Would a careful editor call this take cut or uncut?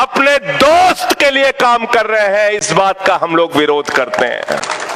uncut